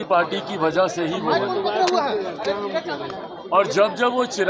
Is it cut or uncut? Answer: uncut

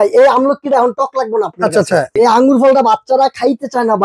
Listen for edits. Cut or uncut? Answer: cut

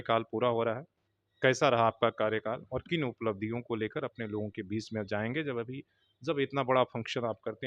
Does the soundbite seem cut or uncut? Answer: uncut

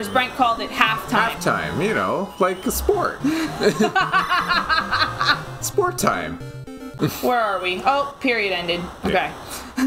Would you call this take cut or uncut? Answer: cut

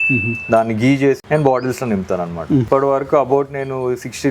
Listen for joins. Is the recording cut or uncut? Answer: cut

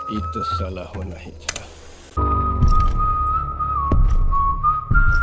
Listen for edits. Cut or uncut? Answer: uncut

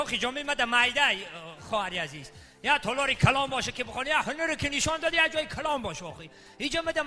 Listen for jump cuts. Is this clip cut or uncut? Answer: cut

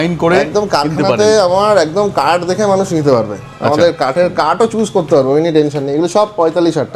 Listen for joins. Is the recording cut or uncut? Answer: uncut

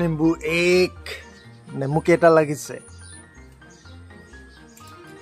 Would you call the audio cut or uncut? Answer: uncut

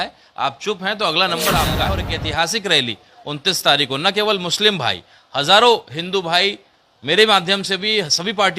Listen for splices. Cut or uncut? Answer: cut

